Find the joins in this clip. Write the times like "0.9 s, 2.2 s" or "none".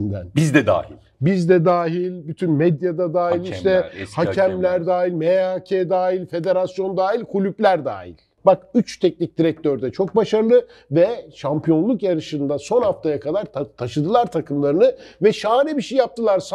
8.2 s

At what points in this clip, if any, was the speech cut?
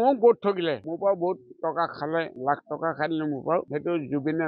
0.9 s, 2.3 s, 3.7 s

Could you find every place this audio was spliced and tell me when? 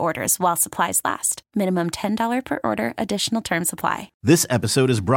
4.1 s

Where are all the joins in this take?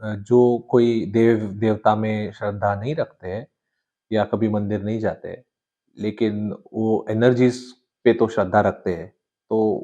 none

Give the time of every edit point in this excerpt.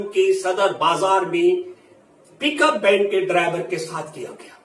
none

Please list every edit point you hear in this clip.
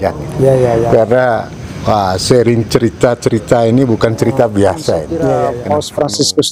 5.5 s

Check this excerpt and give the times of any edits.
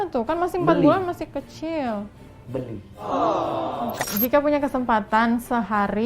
4.0 s

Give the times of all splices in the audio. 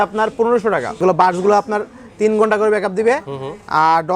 1.0 s

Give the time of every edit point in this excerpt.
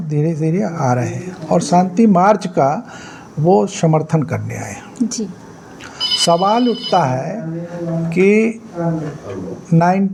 none

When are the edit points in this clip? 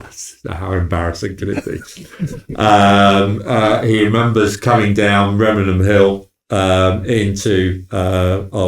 none

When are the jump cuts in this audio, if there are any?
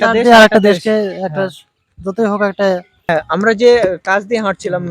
3.1 s

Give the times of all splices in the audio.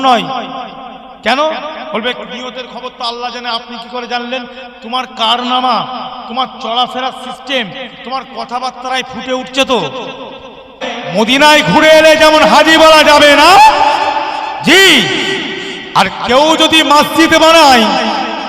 10.9 s

